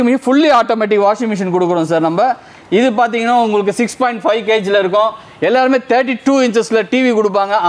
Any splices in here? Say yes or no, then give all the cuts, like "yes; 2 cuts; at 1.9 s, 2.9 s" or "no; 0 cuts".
no; 0 cuts